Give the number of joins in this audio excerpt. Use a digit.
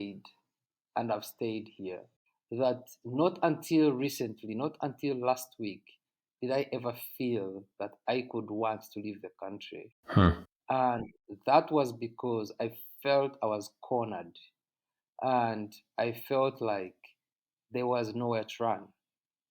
1